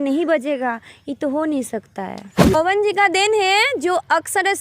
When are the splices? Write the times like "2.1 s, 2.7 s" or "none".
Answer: 2.5 s